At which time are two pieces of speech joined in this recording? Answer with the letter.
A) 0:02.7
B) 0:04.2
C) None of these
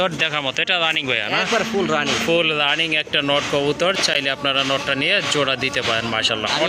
C